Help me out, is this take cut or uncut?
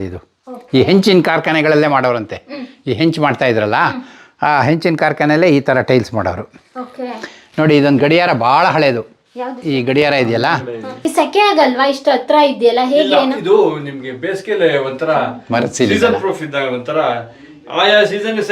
cut